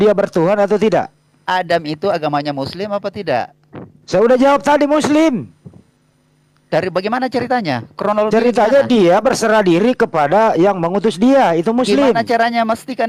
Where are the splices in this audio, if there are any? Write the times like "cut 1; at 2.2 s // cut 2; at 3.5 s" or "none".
none